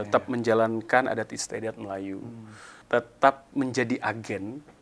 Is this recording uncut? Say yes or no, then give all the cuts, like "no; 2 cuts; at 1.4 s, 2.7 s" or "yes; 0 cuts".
no; 1 cut; at 2.8 s